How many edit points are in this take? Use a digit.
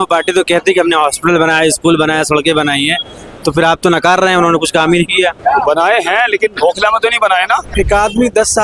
1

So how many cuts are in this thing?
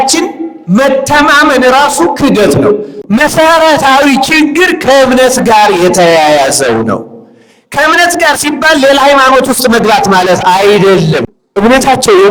2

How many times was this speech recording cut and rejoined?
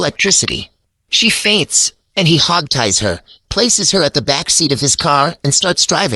0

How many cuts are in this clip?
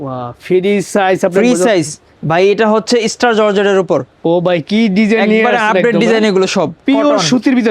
2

